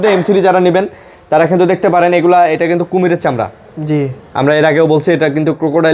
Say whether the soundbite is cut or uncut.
uncut